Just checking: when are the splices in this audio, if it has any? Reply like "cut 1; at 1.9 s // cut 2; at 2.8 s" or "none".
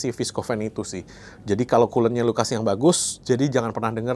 none